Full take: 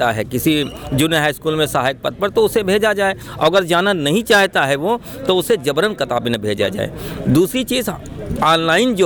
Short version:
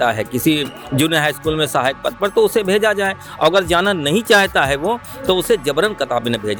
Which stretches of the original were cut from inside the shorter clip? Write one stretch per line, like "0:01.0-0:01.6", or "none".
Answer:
none